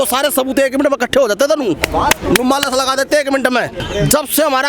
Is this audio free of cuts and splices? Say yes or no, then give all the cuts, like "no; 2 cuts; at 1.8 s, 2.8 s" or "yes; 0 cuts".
no; 1 cut; at 3.7 s